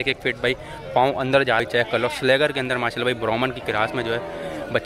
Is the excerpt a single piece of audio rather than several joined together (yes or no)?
no